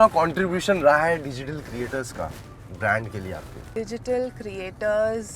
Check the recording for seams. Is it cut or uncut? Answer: cut